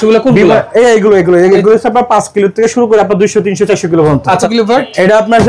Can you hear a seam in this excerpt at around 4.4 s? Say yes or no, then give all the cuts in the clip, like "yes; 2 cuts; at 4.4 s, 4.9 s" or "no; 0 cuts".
yes; 1 cut; at 4.4 s